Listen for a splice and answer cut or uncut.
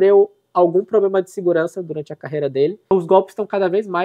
cut